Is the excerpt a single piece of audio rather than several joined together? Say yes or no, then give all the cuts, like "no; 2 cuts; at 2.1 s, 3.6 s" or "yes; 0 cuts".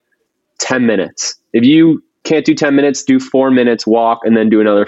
yes; 0 cuts